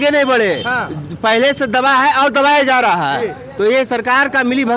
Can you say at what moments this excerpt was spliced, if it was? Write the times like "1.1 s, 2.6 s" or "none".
none